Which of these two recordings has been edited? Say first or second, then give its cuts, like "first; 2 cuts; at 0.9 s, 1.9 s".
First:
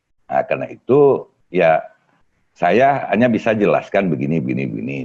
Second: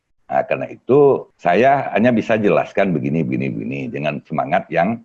second; 1 cut; at 1.3 s